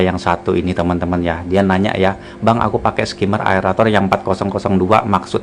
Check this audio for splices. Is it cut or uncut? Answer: uncut